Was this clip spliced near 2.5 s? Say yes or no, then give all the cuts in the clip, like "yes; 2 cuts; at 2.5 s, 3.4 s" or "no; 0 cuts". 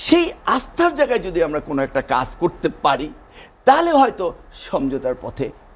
no; 0 cuts